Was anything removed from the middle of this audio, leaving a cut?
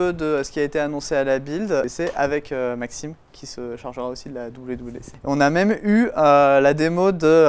yes; 2 cuts; at 1.9 s, 5.1 s

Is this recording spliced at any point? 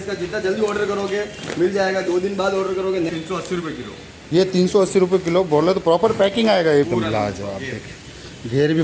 yes; 2 cuts; at 3.1 s, 6.9 s

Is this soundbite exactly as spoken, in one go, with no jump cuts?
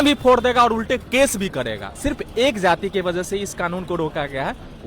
no; 1 cut; at 1.9 s

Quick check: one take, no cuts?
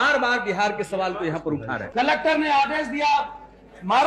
no; 1 cut; at 1.8 s

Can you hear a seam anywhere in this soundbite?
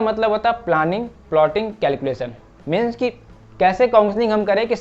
yes; 1 cut; at 3.4 s

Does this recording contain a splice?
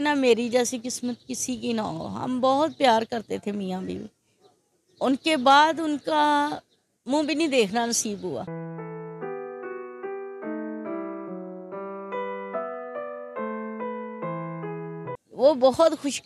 no; 0 cuts

